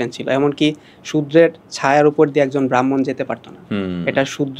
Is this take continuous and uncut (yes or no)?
yes